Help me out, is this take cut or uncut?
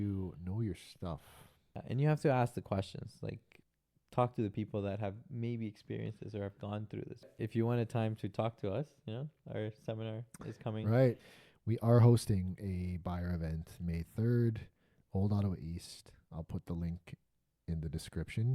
cut